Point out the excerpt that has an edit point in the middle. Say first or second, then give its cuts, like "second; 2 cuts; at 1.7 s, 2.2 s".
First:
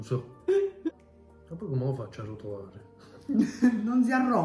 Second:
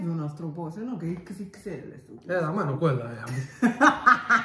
first; 1 cut; at 1.0 s